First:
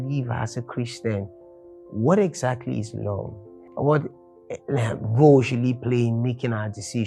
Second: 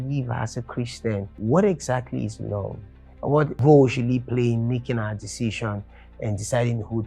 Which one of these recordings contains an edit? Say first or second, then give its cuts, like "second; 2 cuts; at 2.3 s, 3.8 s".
second; 2 cuts; at 1.3 s, 3.5 s